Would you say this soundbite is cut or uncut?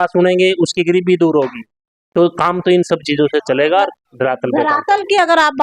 uncut